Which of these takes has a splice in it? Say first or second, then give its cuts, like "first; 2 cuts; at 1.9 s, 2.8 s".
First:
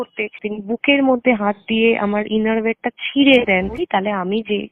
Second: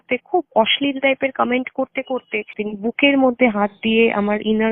first; 1 cut; at 3.8 s